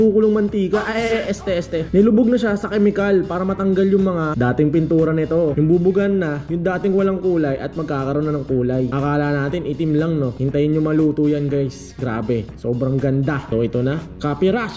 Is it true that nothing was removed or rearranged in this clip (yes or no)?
no